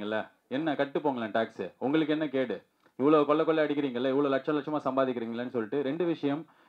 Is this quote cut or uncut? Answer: uncut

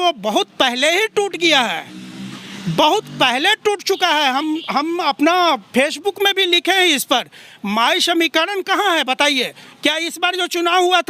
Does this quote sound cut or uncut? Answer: uncut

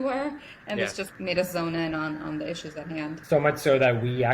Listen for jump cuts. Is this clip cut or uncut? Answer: cut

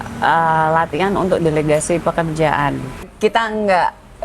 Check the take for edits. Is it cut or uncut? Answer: cut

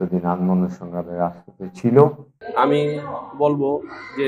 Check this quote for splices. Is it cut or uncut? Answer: cut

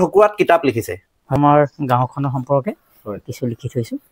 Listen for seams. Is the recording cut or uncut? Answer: cut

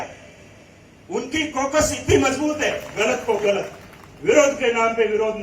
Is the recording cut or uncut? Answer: cut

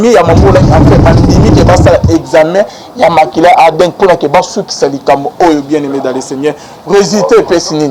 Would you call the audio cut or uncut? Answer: uncut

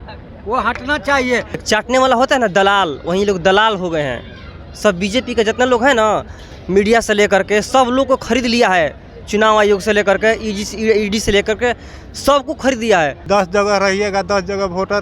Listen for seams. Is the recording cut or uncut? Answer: cut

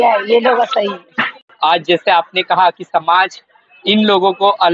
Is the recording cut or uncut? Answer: cut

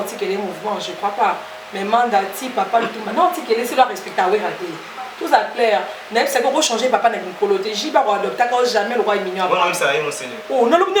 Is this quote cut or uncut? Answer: uncut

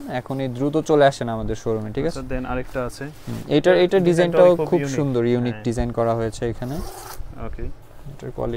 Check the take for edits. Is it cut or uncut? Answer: uncut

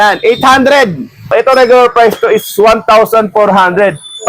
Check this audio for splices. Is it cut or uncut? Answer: cut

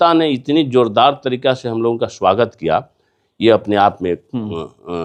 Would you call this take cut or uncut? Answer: uncut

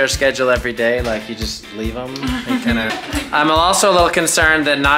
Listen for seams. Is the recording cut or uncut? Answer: cut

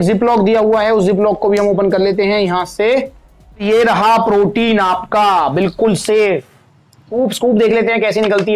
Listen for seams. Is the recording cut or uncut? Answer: cut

